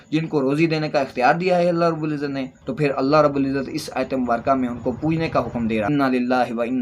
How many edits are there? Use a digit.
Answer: 2